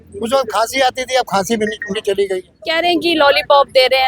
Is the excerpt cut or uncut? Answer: cut